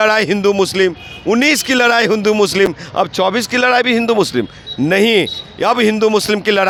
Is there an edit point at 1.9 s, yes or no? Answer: no